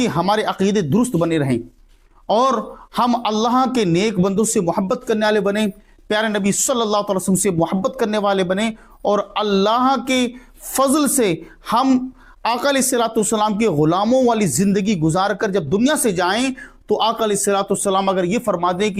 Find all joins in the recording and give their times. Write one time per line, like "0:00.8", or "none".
none